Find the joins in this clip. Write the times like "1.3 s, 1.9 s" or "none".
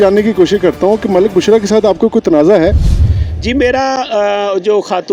none